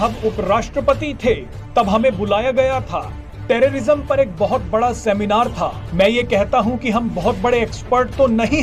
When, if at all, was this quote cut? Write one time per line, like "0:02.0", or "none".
none